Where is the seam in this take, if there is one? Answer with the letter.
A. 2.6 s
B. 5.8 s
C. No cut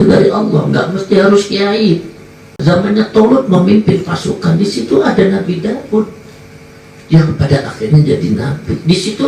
A